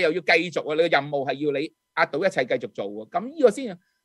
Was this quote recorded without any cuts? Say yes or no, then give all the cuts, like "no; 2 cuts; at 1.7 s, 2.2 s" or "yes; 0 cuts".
yes; 0 cuts